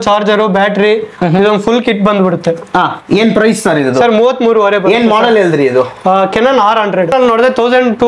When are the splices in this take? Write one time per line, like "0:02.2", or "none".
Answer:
0:07.1